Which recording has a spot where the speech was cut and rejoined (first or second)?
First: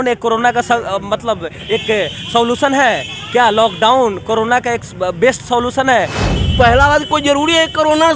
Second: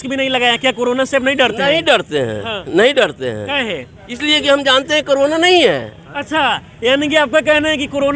first